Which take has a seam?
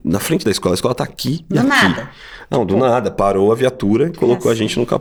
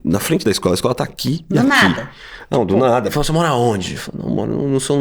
second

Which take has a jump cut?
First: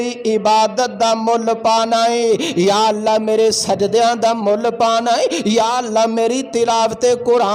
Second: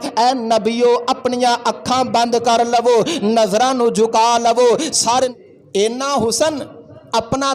second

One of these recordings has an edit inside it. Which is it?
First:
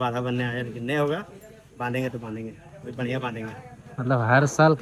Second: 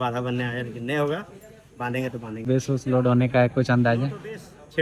second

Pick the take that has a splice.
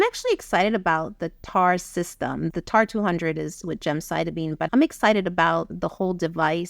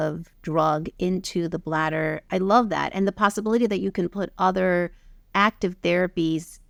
first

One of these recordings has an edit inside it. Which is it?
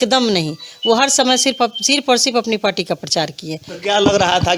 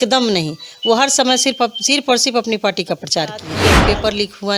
second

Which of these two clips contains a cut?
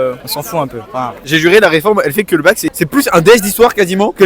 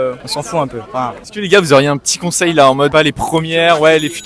first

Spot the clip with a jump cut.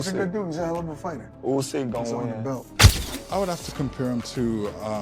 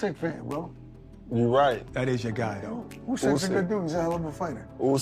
first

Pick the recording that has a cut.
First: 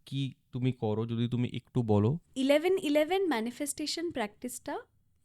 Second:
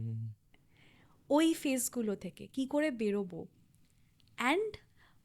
first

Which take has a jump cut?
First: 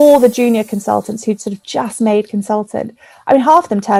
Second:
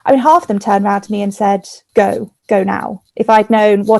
second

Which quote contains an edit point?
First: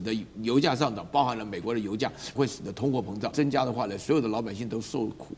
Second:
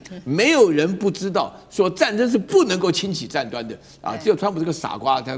first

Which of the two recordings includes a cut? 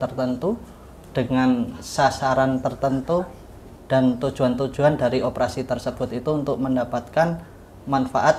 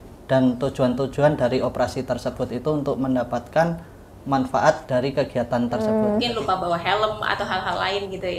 second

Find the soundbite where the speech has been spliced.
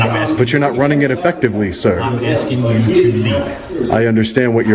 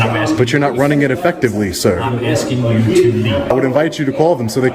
second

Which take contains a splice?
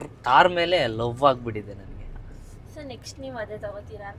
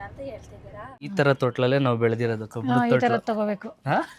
second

